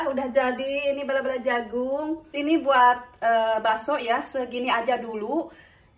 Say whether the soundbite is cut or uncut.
cut